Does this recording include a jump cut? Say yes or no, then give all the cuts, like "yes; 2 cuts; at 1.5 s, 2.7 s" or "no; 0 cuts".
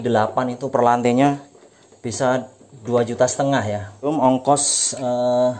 yes; 1 cut; at 4.1 s